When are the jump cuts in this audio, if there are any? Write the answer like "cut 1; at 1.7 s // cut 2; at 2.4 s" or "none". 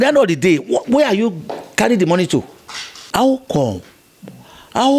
cut 1; at 3.1 s